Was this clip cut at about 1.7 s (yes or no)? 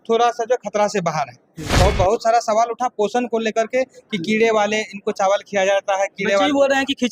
yes